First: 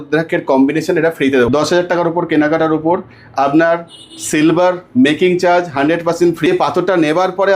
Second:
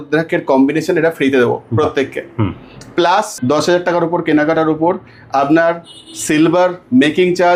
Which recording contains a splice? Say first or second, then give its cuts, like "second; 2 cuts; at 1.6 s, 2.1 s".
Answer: first; 2 cuts; at 1.5 s, 6.5 s